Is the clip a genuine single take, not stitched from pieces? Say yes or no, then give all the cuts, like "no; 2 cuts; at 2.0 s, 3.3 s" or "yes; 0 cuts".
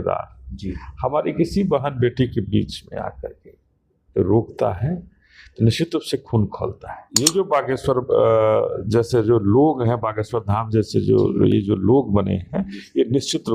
no; 1 cut; at 7.1 s